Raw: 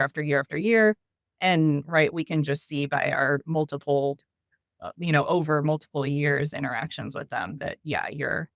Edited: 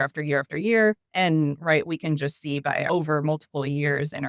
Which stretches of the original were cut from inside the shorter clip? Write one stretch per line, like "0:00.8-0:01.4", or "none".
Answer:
0:01.1-0:01.3
0:03.1-0:05.3